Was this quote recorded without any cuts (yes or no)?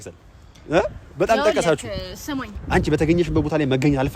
no